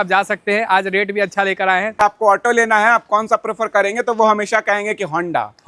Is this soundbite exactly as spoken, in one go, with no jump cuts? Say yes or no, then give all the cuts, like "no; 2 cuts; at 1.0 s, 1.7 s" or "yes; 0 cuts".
no; 1 cut; at 2.0 s